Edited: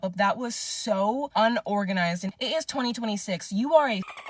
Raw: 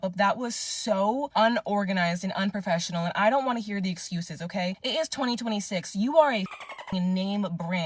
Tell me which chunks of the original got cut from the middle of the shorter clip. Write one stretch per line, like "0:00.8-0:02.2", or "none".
0:02.3-0:04.8